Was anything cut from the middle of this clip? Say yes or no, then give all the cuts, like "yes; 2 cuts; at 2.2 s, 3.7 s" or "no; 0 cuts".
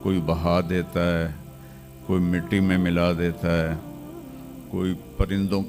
no; 0 cuts